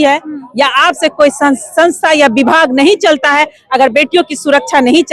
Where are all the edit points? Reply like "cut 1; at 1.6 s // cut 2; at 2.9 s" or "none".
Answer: none